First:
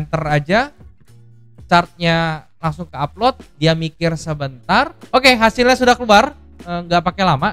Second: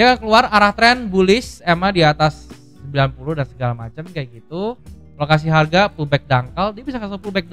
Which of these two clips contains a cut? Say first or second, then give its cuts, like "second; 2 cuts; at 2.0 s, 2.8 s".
first; 1 cut; at 5.0 s